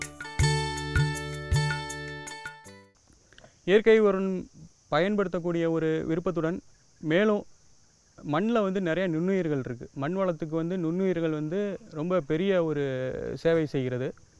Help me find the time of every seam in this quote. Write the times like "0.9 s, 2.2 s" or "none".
7.2 s